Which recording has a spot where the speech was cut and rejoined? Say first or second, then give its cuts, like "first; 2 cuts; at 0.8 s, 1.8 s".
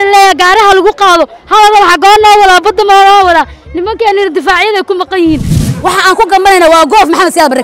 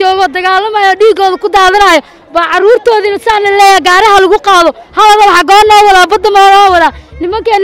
first; 1 cut; at 5.5 s